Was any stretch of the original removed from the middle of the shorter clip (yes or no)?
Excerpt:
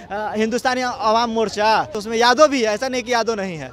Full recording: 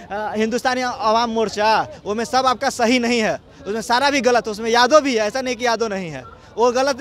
yes